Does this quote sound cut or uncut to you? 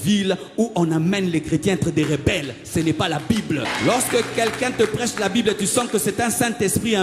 cut